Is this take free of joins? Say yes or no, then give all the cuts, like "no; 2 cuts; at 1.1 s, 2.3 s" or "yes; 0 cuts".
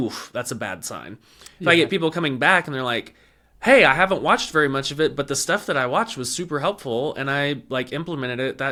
yes; 0 cuts